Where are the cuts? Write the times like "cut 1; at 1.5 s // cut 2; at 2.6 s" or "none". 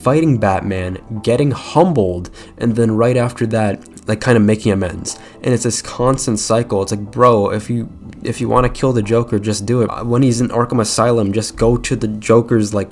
cut 1; at 9.9 s